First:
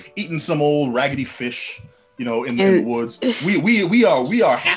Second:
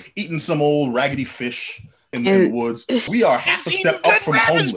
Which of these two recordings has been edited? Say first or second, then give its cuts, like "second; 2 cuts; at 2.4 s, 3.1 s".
second; 2 cuts; at 2.1 s, 3.1 s